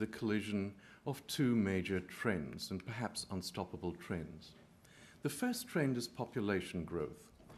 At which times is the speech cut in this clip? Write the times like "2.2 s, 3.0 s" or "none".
none